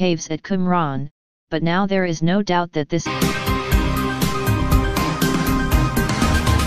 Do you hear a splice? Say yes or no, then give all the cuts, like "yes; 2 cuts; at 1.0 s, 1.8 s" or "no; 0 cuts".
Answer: no; 0 cuts